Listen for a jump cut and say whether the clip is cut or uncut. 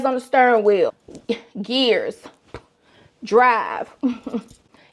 uncut